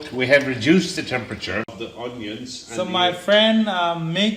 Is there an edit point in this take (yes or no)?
yes